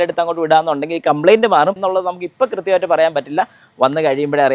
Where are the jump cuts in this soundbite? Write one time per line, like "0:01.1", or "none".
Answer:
0:01.8